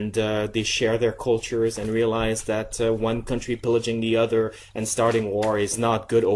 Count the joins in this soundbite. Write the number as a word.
one